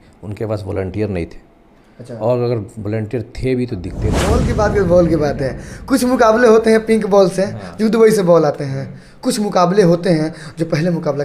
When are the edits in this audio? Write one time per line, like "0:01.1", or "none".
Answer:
0:04.2